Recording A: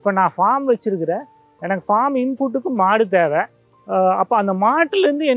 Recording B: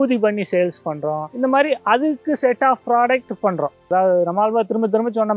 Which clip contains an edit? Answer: B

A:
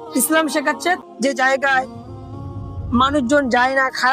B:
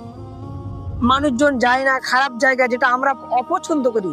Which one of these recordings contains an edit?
A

